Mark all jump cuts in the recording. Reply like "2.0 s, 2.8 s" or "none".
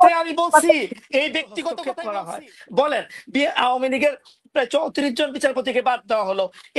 1.9 s